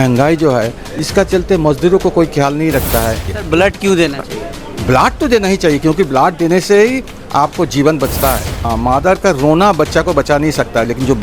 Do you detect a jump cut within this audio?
yes; 2 cuts; at 3.3 s, 8.7 s

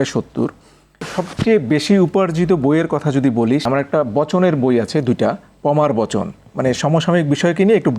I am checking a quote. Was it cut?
yes; 2 cuts; at 1.1 s, 3.6 s

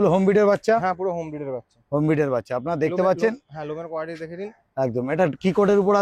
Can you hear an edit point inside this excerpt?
no; 0 cuts

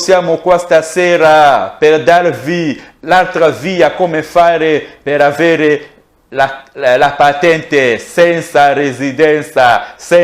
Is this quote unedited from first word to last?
yes; 0 cuts

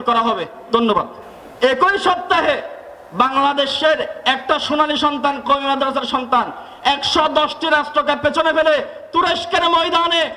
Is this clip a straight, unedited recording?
yes; 0 cuts

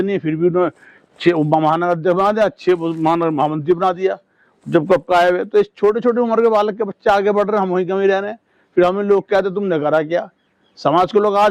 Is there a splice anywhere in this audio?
no; 0 cuts

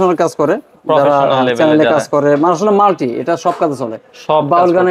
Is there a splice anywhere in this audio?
no; 0 cuts

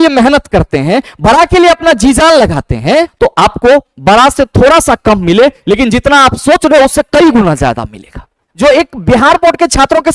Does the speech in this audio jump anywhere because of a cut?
yes; 2 cuts; at 3.1 s, 8.5 s

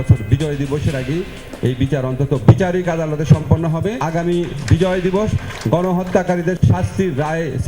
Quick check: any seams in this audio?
yes; 2 cuts; at 4.0 s, 6.6 s

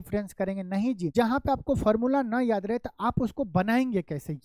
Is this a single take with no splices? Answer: no; 1 cut; at 1.0 s

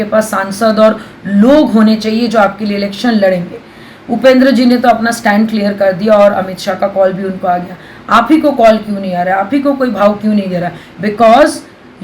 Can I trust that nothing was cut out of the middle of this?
no; 1 cut; at 10.8 s

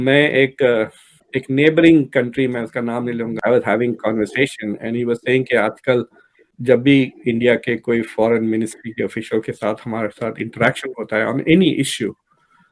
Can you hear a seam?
no; 0 cuts

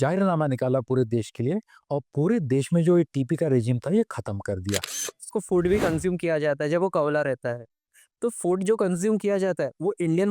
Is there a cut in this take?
yes; 1 cut; at 5.2 s

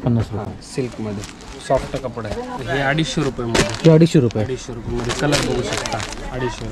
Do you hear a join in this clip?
yes; 1 cut; at 2.5 s

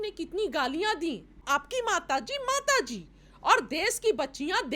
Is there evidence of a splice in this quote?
yes; 1 cut; at 1.4 s

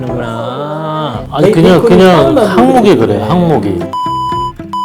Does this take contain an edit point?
yes; 1 cut; at 1.2 s

